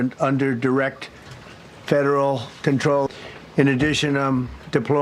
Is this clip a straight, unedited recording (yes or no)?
no